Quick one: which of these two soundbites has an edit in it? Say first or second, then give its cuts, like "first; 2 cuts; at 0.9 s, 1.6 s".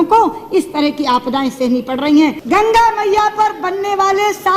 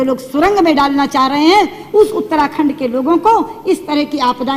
first; 1 cut; at 2.4 s